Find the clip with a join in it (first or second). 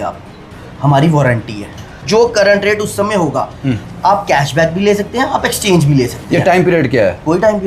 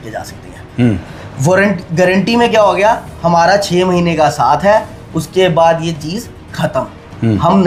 first